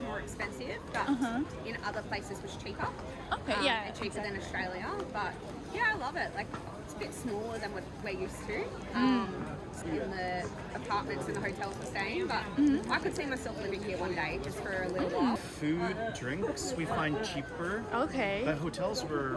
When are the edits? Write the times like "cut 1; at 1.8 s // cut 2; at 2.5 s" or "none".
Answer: cut 1; at 9.8 s // cut 2; at 15.4 s